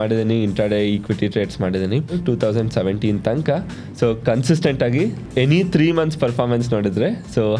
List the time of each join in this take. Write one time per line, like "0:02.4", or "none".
0:02.2
0:05.2